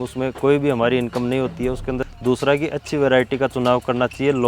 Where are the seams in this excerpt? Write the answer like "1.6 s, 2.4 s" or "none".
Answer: 2.1 s

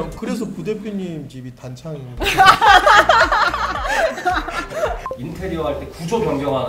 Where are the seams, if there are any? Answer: none

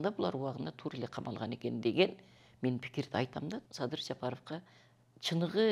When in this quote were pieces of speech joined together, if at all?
3.6 s

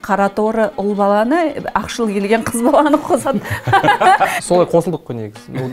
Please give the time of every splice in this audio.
4.3 s

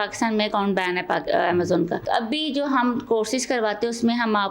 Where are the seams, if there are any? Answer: 2.0 s

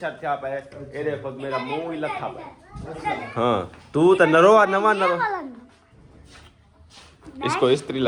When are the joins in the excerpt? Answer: none

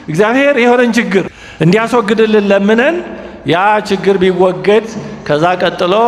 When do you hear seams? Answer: 1.4 s

